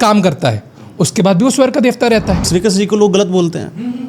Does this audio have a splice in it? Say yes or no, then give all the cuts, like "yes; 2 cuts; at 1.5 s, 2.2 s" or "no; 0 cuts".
yes; 1 cut; at 2.5 s